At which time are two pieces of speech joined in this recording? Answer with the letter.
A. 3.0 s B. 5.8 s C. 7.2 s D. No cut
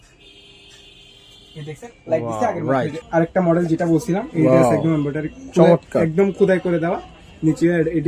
A